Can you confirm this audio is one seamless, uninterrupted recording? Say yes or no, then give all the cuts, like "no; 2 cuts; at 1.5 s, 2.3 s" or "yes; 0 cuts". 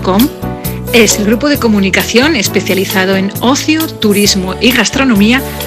yes; 0 cuts